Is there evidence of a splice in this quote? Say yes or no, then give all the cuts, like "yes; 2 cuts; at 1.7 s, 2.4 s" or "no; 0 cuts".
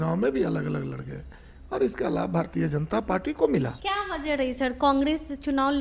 yes; 1 cut; at 3.8 s